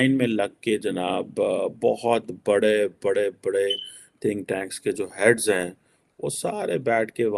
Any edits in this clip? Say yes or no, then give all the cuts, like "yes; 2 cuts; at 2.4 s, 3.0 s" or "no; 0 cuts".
no; 0 cuts